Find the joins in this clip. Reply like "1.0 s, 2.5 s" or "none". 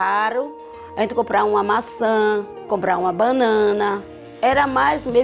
2.7 s, 4.3 s